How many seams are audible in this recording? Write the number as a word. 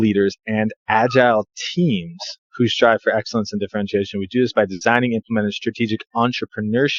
zero